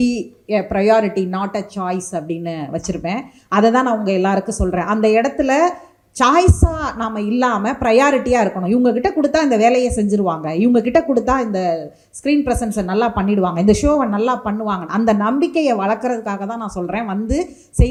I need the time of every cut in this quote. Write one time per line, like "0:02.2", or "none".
none